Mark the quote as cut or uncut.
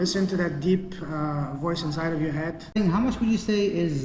cut